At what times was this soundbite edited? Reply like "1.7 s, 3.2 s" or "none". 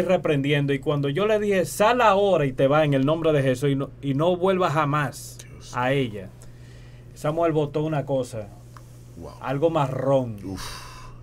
none